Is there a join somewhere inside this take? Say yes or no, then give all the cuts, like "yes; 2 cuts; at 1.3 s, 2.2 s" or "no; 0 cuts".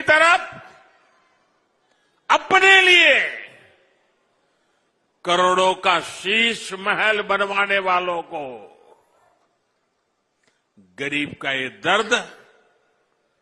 no; 0 cuts